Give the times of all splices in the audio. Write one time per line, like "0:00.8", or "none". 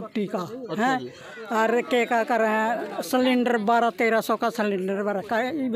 none